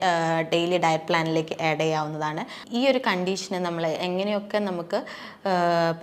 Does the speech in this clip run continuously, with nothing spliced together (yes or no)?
no